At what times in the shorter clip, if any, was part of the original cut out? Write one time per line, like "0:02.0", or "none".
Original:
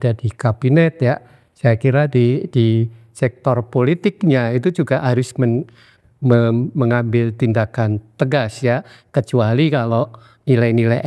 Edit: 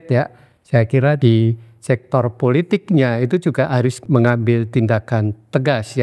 0:01.2
0:04.0